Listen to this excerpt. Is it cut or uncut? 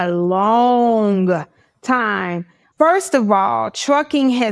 cut